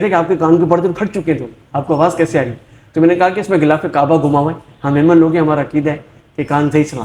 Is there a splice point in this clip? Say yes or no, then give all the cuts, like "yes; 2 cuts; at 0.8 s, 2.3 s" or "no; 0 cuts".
no; 0 cuts